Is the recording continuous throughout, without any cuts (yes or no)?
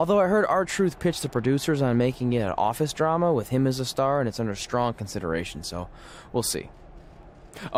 yes